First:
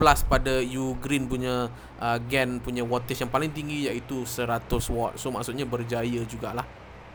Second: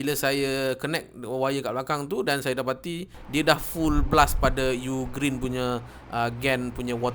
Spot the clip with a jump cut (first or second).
second